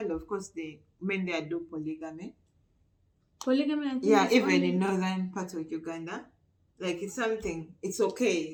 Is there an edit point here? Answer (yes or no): no